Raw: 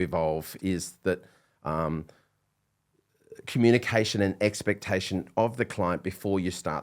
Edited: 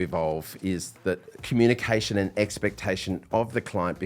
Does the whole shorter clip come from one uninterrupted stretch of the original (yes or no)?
no